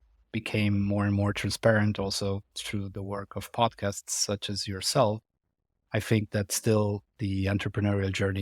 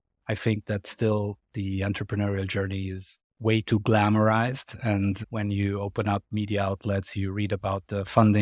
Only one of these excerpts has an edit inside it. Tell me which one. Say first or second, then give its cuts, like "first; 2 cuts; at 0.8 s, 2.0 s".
second; 1 cut; at 5.2 s